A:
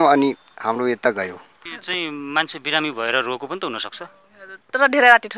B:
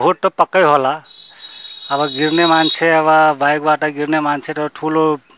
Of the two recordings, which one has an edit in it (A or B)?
A